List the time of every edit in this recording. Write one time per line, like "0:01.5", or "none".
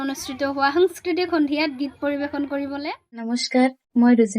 0:03.3